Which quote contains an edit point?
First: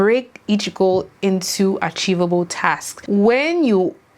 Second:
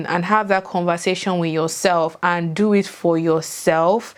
first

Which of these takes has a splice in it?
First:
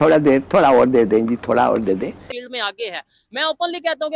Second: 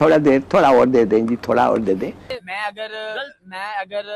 first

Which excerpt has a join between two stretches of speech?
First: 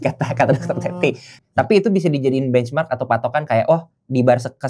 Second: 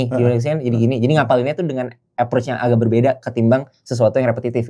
first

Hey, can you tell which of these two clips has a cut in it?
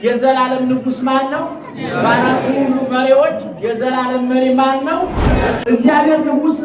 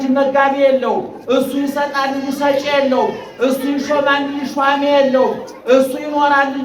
first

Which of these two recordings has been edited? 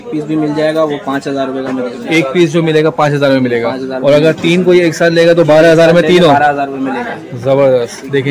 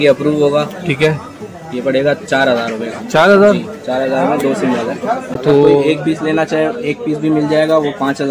second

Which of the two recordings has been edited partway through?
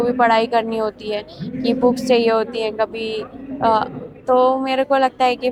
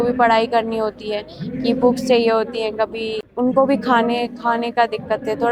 second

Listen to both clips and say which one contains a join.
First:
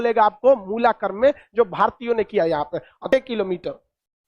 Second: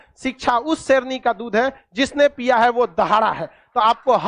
first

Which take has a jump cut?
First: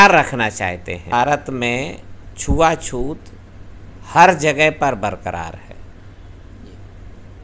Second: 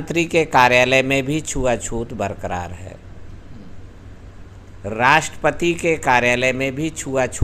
first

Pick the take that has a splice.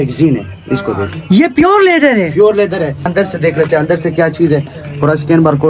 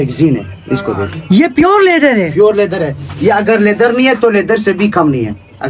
first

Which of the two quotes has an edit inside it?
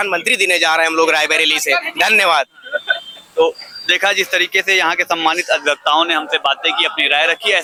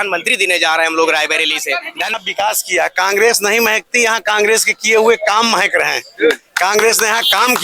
second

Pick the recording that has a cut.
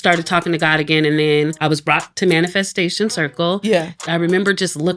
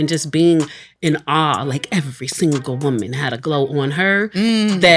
first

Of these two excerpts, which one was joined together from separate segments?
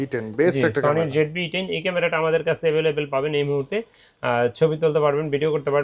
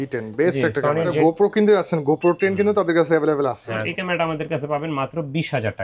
second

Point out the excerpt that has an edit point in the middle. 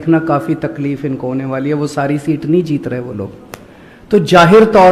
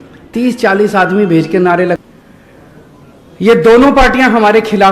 second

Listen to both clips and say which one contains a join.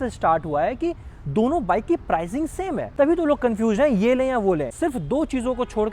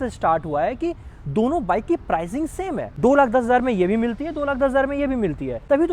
first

